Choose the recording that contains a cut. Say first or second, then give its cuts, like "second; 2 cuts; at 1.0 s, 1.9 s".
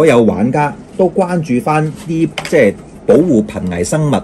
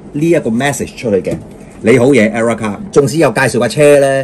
second; 1 cut; at 2.8 s